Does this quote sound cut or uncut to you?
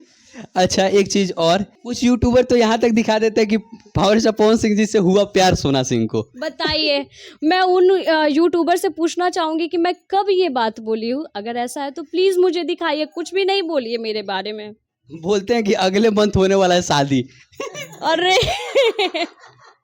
cut